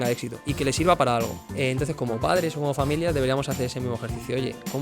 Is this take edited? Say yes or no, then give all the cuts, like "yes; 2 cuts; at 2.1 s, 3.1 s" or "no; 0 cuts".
yes; 1 cut; at 1.4 s